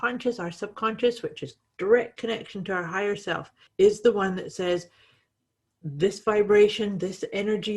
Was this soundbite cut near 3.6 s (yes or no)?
yes